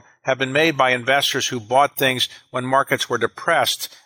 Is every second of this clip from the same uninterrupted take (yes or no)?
yes